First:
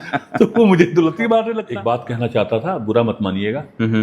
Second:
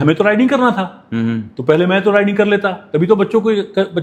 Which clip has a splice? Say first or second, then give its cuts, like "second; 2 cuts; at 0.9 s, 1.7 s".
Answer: first; 1 cut; at 1.6 s